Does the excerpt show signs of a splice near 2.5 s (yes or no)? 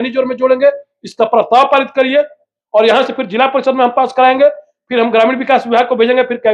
no